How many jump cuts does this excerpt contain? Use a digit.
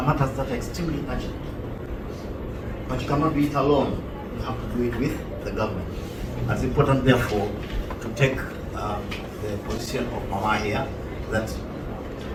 0